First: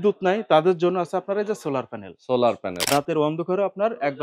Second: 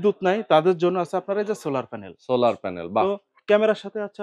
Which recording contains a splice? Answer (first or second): first